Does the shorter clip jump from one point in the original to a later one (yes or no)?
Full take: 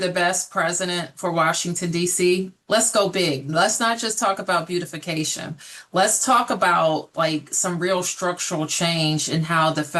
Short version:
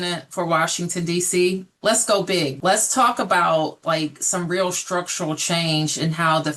yes